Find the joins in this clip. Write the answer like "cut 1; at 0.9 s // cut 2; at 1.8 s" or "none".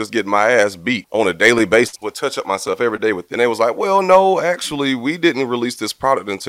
cut 1; at 1.0 s // cut 2; at 2.0 s // cut 3; at 3.3 s

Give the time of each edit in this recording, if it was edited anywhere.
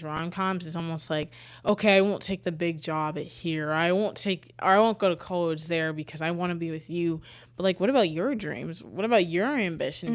none

